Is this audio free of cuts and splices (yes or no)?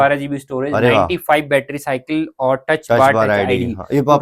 yes